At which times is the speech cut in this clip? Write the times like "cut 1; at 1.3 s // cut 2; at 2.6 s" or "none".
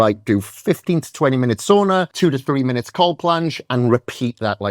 cut 1; at 2.1 s